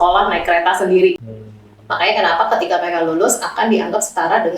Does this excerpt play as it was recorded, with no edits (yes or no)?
no